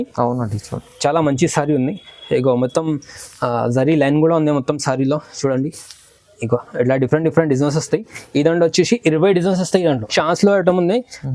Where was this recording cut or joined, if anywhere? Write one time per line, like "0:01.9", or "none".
0:10.1